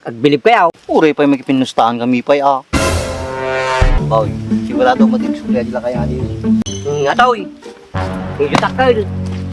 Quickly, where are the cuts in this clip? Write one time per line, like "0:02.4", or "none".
0:00.8
0:03.9
0:06.6